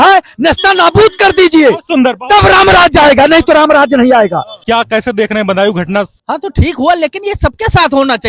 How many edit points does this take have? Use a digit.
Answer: 2